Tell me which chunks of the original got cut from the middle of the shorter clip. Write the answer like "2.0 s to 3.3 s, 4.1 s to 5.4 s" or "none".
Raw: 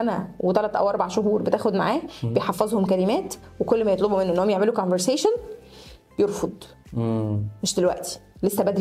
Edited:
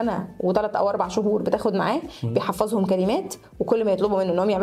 none